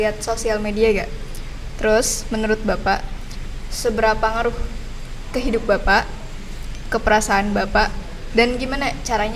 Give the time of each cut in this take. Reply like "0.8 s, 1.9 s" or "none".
none